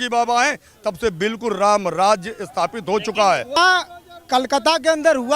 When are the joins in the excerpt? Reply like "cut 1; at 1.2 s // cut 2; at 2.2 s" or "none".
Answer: cut 1; at 3.6 s